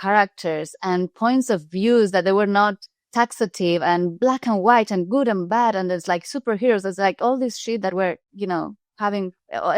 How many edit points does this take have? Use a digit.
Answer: 0